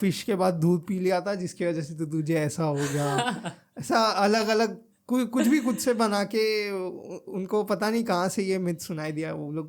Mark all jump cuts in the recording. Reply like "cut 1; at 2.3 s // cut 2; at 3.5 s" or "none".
none

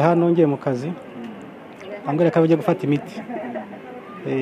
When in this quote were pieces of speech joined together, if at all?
none

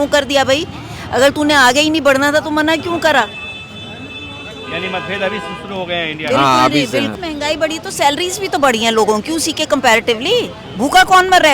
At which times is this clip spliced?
cut 1; at 7.1 s

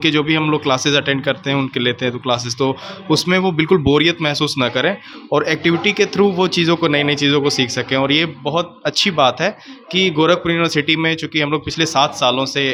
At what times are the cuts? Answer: none

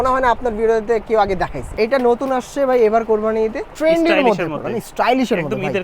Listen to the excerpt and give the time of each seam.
cut 1; at 1.6 s // cut 2; at 3.6 s

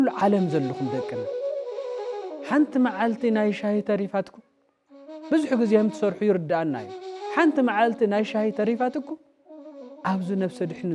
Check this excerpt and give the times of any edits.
none

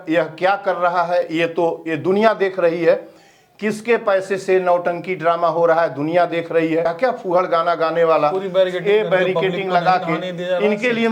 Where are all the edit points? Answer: cut 1; at 6.9 s

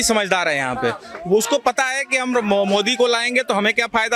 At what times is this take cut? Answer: none

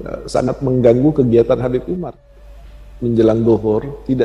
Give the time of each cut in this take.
cut 1; at 2.1 s

